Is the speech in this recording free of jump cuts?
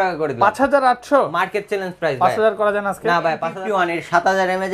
no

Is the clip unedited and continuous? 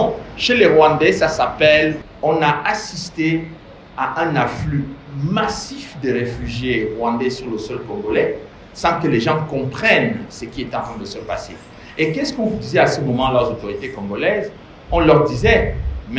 no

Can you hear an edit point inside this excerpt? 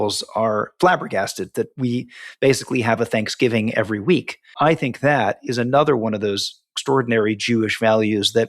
yes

